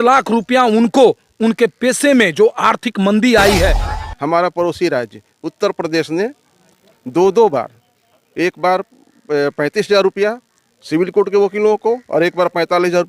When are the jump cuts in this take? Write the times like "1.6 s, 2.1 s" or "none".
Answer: 3.9 s

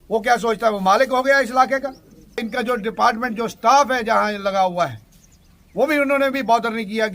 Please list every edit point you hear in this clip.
2.5 s

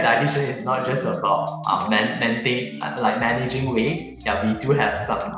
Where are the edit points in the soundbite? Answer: none

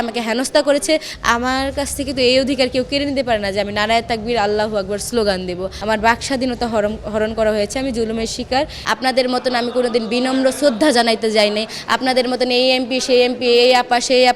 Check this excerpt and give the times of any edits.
1.1 s, 5.7 s, 8.8 s

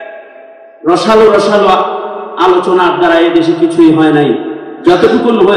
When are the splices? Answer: none

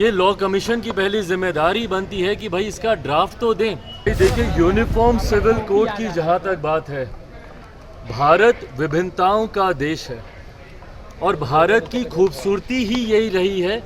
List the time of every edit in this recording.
4.1 s

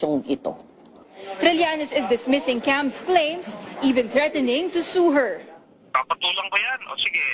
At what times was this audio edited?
1.3 s

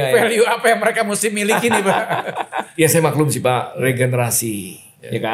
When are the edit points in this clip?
2.6 s

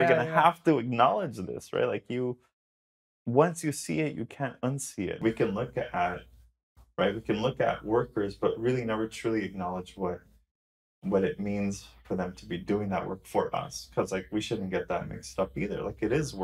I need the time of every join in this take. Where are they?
5.2 s

